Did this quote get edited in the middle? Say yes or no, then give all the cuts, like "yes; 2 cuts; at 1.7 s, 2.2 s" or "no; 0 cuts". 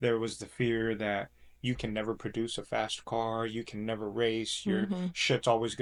no; 0 cuts